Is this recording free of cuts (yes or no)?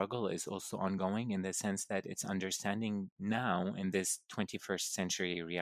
yes